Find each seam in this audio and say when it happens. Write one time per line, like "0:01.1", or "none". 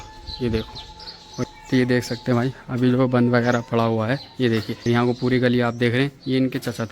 0:01.4
0:04.8